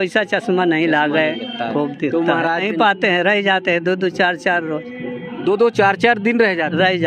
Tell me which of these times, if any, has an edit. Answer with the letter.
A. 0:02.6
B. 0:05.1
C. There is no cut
A